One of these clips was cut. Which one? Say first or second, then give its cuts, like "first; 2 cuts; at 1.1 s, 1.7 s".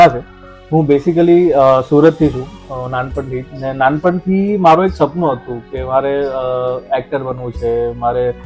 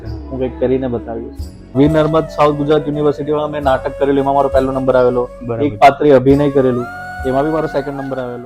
second; 1 cut; at 1.7 s